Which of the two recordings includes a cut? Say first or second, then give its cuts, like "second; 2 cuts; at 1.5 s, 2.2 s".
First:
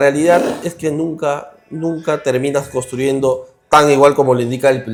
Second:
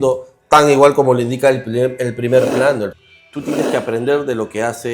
second; 1 cut; at 2.9 s